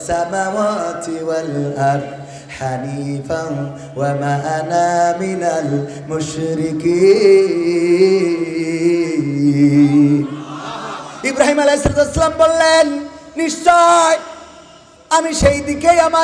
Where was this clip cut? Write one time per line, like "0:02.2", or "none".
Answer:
none